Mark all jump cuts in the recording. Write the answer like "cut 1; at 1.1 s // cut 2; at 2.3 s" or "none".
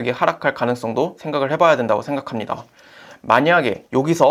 none